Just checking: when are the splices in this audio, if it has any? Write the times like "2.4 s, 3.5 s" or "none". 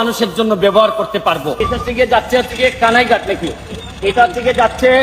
1.7 s